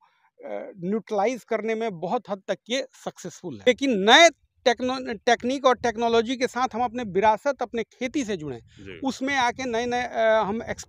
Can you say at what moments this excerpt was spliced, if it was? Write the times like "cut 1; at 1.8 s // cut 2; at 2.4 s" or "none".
cut 1; at 3.7 s